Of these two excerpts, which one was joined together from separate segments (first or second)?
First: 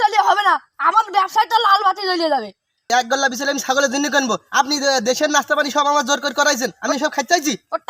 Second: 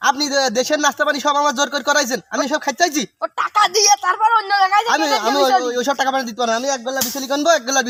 first